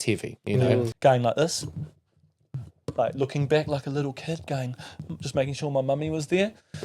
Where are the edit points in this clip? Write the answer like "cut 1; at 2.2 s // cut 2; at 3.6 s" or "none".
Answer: cut 1; at 0.9 s